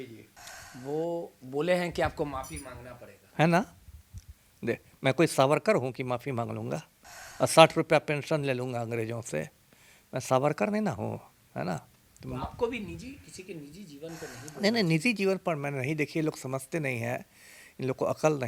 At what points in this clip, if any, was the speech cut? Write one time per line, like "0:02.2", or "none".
none